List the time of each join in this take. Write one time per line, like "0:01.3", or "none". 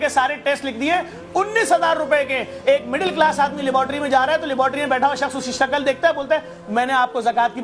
none